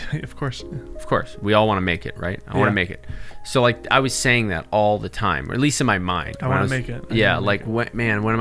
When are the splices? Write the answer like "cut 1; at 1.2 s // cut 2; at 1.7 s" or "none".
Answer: none